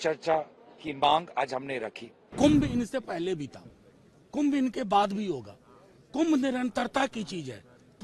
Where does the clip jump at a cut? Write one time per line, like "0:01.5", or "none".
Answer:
0:02.3